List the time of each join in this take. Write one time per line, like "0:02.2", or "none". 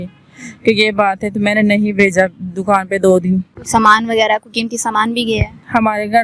0:03.5